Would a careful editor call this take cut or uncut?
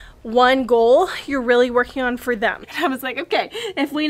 cut